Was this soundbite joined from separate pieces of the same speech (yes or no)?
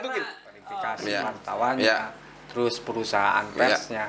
yes